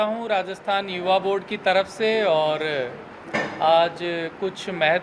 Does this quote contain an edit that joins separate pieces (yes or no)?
no